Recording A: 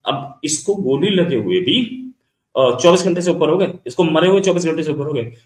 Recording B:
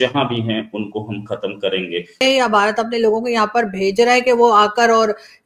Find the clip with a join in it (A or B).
B